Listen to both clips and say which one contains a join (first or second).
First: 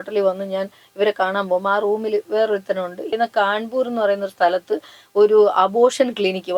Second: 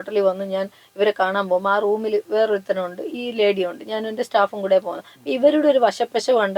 first